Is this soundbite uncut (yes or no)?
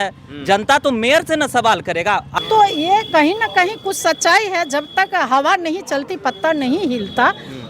no